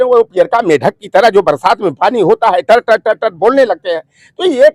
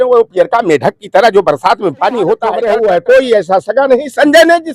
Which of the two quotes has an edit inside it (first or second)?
second